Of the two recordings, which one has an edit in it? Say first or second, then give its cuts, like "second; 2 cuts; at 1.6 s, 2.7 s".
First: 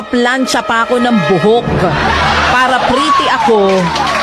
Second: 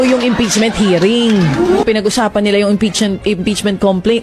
second; 1 cut; at 1.8 s